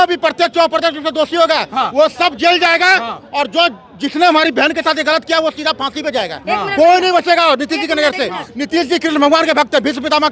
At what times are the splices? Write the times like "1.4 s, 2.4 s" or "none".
none